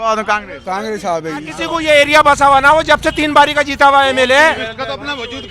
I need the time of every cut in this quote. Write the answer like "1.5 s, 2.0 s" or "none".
1.6 s